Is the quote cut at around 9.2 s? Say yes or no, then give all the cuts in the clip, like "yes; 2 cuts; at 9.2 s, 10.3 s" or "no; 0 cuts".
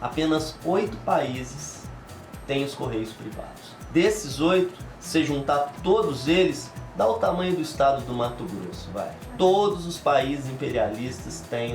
yes; 1 cut; at 9.2 s